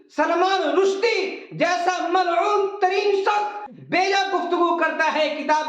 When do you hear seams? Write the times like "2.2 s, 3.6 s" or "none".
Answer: 3.7 s